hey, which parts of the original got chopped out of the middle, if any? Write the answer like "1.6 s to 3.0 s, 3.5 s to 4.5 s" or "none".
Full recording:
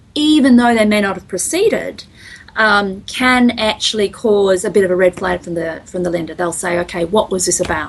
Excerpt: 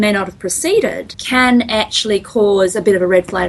2.0 s to 3.0 s